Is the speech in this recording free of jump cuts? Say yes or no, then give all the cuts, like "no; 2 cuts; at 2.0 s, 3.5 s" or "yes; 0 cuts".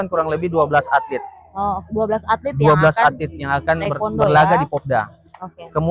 yes; 0 cuts